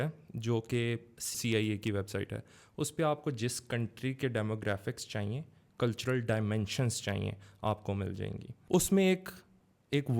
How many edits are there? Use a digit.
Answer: 2